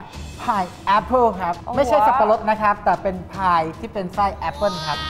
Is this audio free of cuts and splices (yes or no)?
yes